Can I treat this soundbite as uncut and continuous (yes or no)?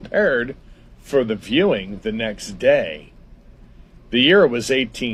yes